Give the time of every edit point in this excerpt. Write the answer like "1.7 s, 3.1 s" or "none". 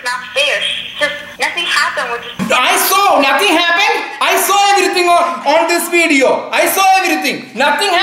1.2 s, 2.4 s